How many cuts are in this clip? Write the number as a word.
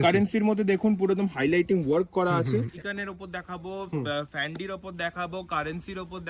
one